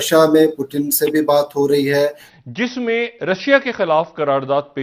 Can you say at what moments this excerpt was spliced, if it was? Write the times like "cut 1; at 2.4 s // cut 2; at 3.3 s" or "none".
cut 1; at 2.3 s